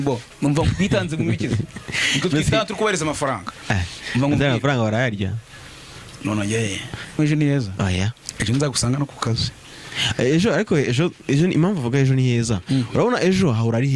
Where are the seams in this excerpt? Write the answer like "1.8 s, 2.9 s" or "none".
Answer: 7.2 s